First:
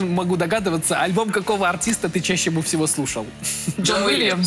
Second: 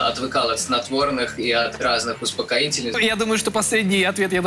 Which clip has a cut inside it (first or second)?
second